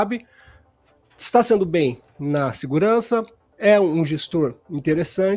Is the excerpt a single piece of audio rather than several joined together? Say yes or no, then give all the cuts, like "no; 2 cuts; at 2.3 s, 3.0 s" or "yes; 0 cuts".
yes; 0 cuts